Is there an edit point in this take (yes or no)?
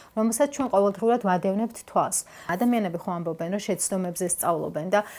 yes